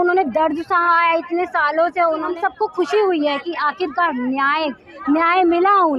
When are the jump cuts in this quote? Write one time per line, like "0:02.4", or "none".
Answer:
0:02.3